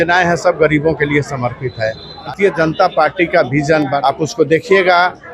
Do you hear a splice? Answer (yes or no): yes